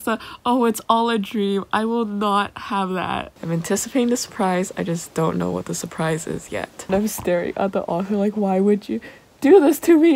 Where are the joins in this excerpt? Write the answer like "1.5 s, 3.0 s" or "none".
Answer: 3.3 s, 6.9 s